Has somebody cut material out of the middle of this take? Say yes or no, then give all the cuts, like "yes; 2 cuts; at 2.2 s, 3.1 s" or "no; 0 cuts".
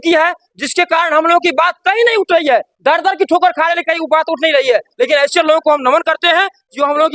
no; 0 cuts